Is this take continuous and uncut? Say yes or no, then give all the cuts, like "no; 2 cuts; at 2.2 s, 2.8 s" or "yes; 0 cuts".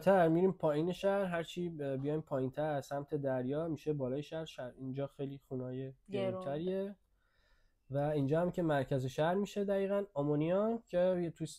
yes; 0 cuts